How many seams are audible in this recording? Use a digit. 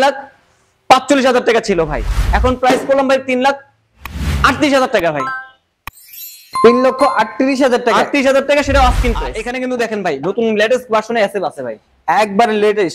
1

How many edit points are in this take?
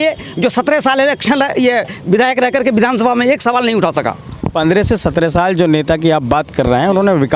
0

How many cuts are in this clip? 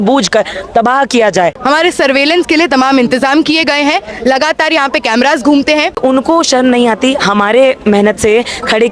2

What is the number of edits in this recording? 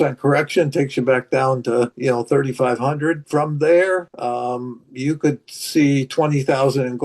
3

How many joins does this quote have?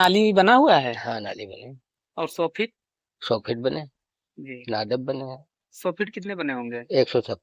0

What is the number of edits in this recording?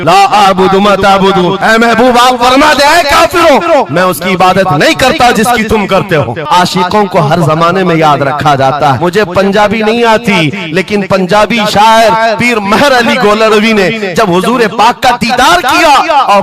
2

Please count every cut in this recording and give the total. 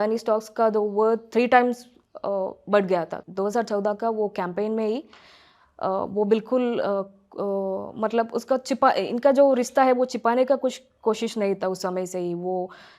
1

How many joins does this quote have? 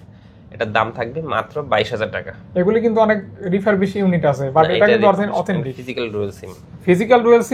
0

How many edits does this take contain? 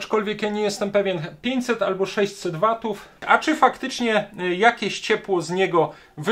1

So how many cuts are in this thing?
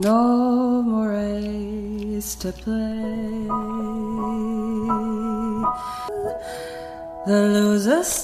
1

